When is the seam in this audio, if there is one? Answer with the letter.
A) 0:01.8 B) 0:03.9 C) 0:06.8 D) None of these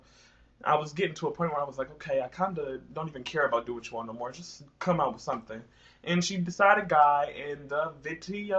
C